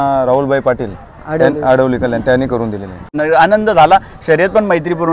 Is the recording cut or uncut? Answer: cut